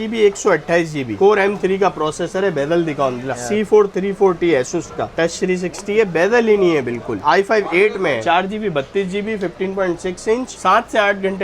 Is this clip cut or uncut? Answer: cut